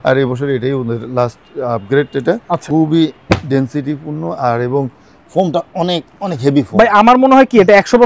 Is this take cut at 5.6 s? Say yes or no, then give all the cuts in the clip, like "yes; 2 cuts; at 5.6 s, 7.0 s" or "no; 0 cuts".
no; 1 cut; at 2.6 s